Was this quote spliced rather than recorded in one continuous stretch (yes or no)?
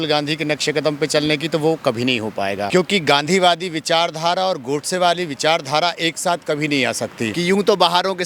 yes